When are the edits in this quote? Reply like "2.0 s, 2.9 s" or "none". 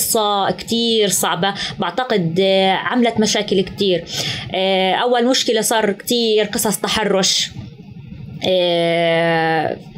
none